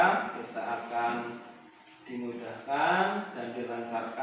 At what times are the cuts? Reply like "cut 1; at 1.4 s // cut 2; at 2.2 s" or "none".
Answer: none